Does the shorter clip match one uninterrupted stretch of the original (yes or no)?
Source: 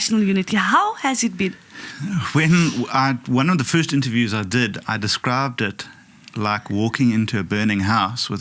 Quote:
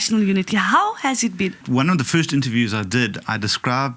no